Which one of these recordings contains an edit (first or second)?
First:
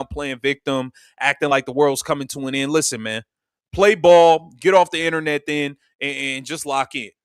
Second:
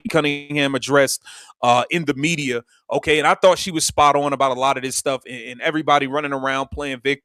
first